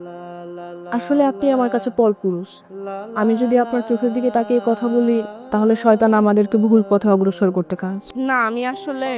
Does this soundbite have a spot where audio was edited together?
yes; 1 cut; at 8.0 s

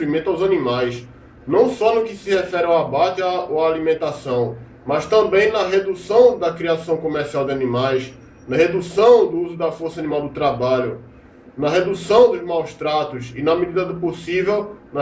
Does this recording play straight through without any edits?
no; 1 cut; at 6.8 s

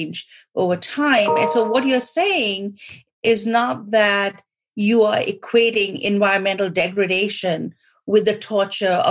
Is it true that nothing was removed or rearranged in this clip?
yes; 0 cuts

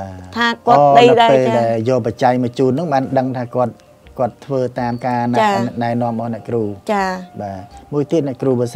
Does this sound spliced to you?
no; 0 cuts

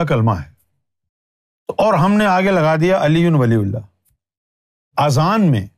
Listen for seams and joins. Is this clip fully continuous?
yes; 0 cuts

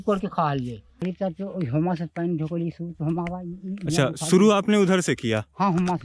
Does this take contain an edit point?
yes; 1 cut; at 1.0 s

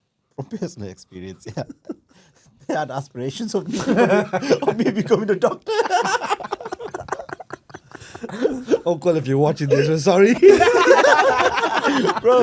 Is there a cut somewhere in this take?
no; 0 cuts

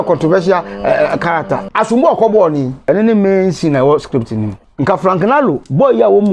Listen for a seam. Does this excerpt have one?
yes; 3 cuts; at 1.7 s, 2.7 s, 4.6 s

